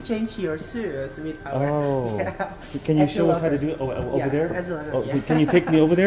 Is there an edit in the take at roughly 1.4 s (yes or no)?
no